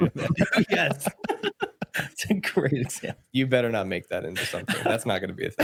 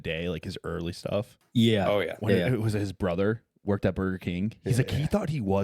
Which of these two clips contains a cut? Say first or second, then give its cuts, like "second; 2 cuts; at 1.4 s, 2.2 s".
second; 1 cut; at 1.4 s